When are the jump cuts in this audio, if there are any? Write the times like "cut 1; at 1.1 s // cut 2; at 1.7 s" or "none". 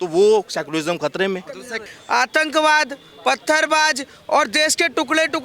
cut 1; at 1.8 s